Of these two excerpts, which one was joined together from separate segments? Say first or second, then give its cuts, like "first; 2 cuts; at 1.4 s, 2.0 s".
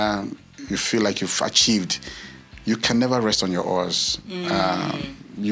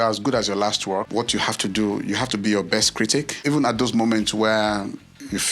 second; 2 cuts; at 1.1 s, 3.3 s